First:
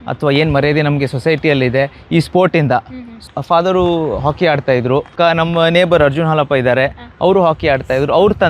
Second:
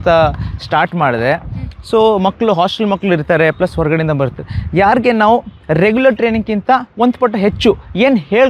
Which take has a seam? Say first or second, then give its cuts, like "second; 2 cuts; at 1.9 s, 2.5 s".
first; 2 cuts; at 3.2 s, 5.1 s